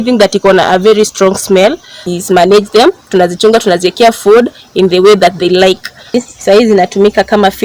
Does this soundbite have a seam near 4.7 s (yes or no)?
no